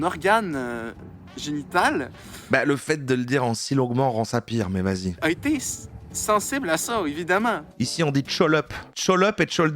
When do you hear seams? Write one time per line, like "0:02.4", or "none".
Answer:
0:05.1
0:07.7
0:08.8